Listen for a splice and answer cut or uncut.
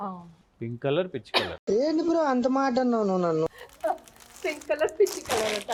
uncut